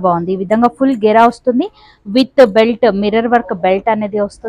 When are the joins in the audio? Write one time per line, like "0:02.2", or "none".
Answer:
none